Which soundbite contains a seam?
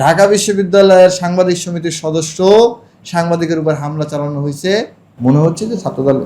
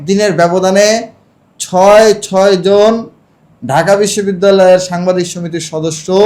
first; 1 cut; at 5.0 s

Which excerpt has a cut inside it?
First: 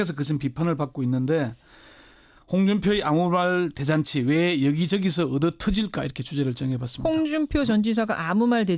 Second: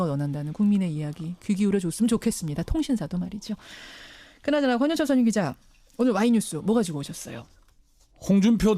second; 1 cut; at 6.0 s

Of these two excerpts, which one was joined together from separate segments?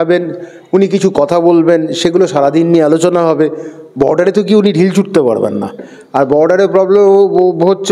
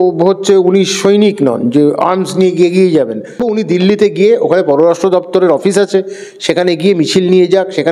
second; 1 cut; at 3.4 s

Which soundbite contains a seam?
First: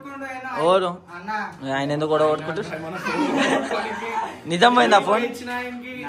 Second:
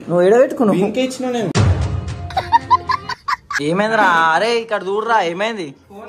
second; 1 cut; at 3.5 s

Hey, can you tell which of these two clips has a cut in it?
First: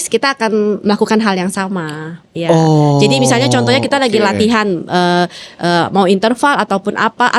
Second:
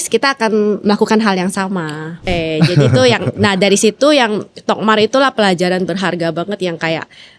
second; 1 cut; at 2.3 s

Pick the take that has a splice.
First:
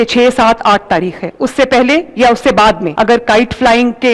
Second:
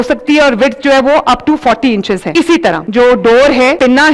first; 1 cut; at 2.9 s

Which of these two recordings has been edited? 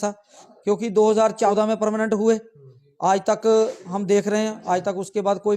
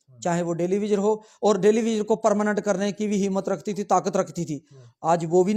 first; 1 cut; at 1.5 s

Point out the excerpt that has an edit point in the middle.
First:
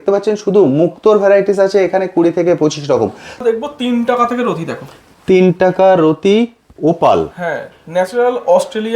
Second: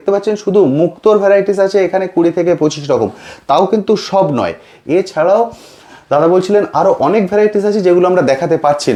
first; 1 cut; at 3.4 s

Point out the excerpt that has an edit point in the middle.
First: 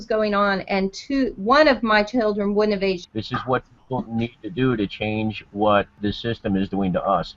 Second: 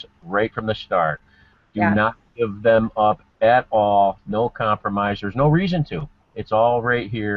first; 2 cuts; at 3.0 s, 6.0 s

